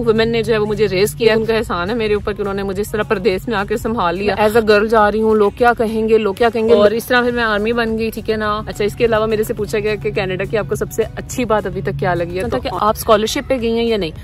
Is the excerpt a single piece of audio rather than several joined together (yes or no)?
no